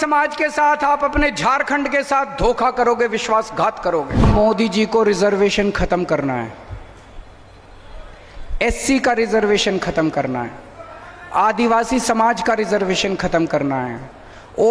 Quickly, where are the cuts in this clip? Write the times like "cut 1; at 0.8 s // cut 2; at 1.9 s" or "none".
cut 1; at 4.2 s